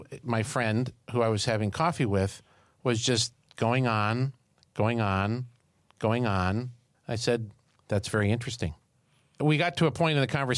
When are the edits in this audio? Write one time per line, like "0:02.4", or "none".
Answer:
0:08.9